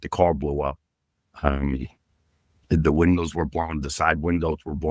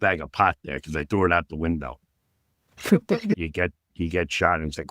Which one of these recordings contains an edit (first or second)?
second